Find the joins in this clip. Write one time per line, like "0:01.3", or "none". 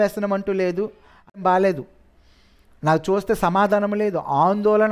0:01.4